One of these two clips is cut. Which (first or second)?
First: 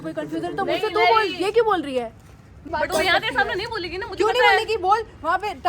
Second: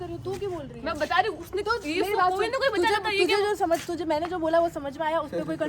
first